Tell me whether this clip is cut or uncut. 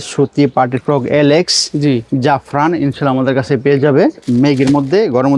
cut